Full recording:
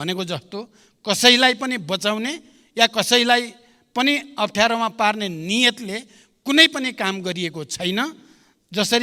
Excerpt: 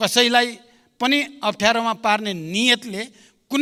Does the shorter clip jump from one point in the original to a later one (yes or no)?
no